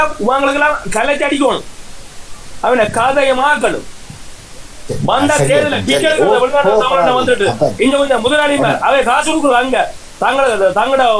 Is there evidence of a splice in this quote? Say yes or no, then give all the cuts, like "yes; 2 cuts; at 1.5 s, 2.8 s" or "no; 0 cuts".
no; 0 cuts